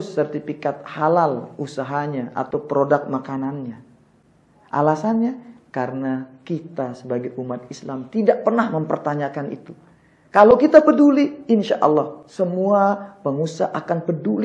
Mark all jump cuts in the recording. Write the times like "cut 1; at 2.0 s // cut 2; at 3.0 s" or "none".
none